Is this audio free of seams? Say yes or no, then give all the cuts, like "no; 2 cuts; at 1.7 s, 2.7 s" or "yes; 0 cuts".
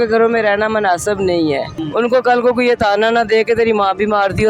no; 1 cut; at 1.8 s